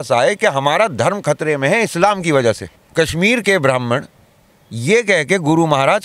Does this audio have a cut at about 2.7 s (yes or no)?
yes